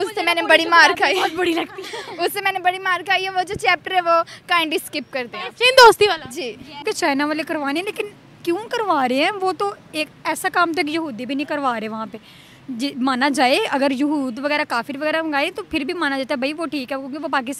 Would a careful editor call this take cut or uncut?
cut